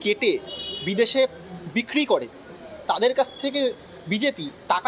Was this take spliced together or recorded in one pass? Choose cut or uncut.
uncut